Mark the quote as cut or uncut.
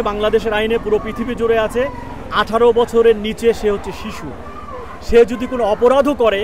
uncut